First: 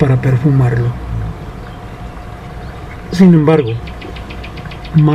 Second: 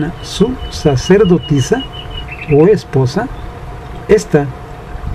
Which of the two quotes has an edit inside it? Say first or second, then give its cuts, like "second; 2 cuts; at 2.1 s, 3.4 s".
first; 1 cut; at 1.6 s